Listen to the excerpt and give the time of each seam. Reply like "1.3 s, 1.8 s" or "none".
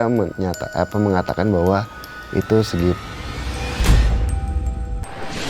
3.2 s